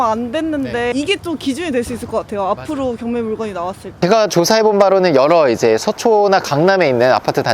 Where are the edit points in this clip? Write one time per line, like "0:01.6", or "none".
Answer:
0:00.9
0:04.0